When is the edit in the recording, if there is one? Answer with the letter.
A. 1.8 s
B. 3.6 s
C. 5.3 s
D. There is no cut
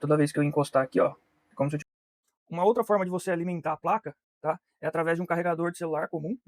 A